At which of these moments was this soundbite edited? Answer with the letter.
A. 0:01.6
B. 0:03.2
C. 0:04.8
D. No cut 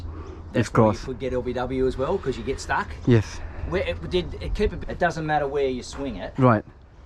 C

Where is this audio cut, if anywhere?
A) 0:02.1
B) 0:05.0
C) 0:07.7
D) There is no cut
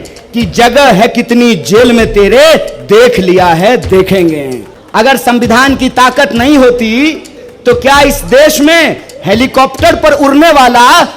B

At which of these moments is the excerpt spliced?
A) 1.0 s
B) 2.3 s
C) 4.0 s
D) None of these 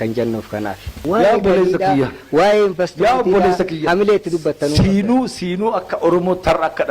A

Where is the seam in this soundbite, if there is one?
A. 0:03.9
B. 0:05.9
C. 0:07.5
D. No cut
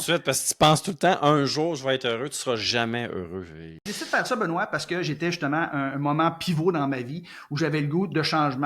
A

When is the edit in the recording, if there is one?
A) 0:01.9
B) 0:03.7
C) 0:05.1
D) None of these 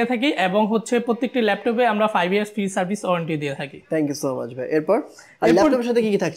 D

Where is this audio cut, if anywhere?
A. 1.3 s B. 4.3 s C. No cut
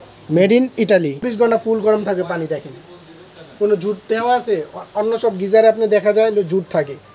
A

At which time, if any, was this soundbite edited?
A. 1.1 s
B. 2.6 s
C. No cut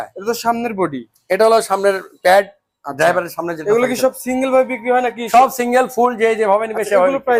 C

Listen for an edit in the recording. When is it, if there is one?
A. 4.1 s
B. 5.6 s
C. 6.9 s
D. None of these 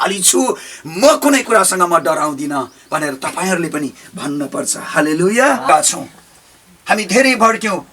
B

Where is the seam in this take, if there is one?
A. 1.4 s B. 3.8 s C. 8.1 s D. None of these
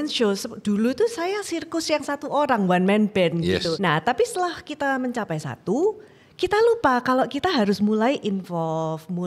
B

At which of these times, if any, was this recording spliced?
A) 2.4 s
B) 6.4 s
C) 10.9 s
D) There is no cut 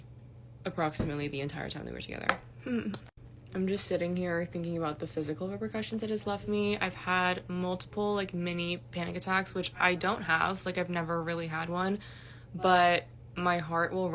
C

